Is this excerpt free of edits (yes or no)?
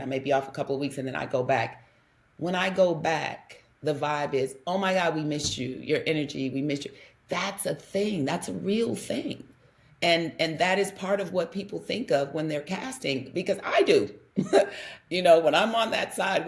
yes